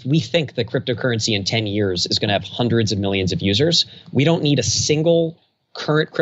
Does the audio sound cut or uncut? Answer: uncut